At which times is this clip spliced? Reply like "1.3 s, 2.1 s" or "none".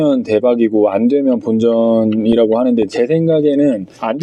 none